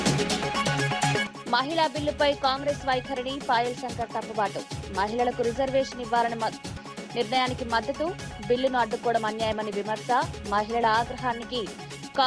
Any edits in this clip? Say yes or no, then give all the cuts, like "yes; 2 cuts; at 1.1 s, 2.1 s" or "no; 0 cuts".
yes; 1 cut; at 1.3 s